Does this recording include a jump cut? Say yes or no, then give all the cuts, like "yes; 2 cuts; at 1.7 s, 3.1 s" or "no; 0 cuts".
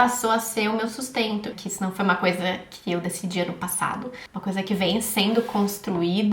yes; 1 cut; at 1.5 s